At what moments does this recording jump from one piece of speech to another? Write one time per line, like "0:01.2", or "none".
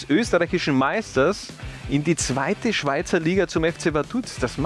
none